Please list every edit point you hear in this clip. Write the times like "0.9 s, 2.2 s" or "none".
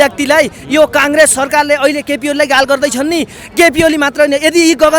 none